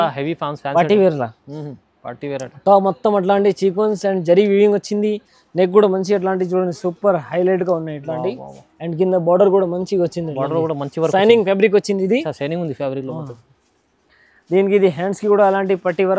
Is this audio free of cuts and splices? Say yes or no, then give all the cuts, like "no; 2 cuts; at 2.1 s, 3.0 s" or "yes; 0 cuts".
yes; 0 cuts